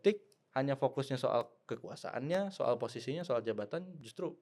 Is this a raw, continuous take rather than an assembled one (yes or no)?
yes